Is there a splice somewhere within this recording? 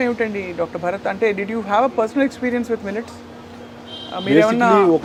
no; 0 cuts

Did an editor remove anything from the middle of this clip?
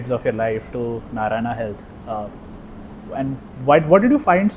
no; 0 cuts

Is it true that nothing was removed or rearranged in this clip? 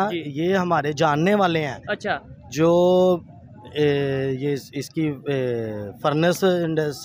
yes; 0 cuts

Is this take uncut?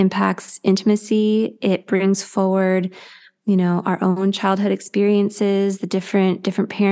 yes; 0 cuts

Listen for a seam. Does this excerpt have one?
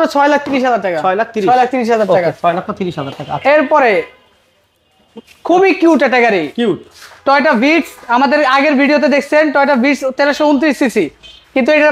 no; 0 cuts

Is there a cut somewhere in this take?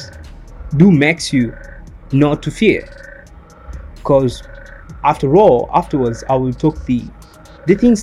no; 0 cuts

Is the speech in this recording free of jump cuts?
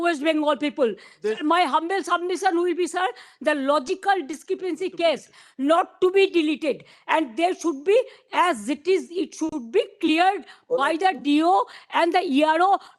yes; 0 cuts

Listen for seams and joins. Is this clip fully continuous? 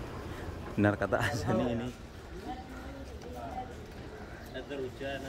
no; 1 cut; at 1.8 s

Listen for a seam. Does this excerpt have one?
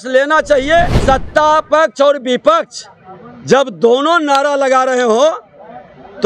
yes; 1 cut; at 1.0 s

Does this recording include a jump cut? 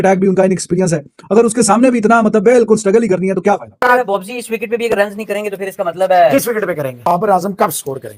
yes; 2 cuts; at 3.7 s, 6.9 s

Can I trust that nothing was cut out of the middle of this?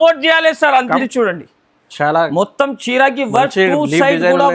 no; 1 cut; at 1.0 s

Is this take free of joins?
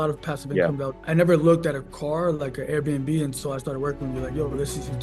no; 1 cut; at 0.9 s

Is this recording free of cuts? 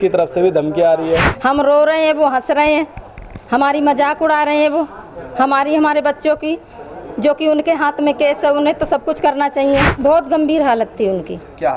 no; 2 cuts; at 1.3 s, 9.9 s

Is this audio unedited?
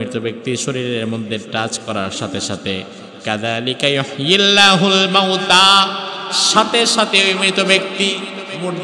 yes; 0 cuts

